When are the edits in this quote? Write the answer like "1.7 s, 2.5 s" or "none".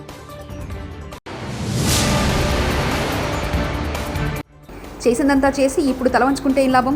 1.2 s, 4.5 s